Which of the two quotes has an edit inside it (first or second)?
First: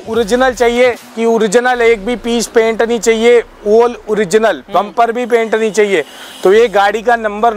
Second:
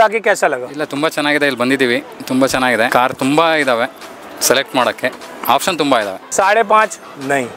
second